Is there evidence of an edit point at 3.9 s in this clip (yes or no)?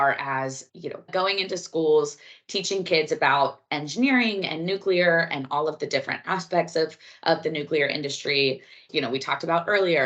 no